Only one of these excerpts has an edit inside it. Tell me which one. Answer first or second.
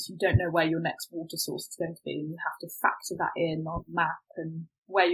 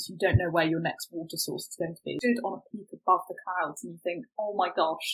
second